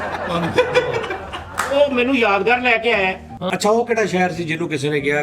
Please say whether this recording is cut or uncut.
cut